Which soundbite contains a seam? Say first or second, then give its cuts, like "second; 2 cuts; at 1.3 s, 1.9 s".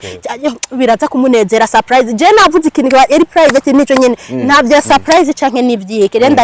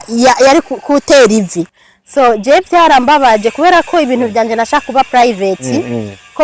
second; 1 cut; at 1.7 s